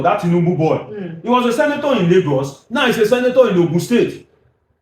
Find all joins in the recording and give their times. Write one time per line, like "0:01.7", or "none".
none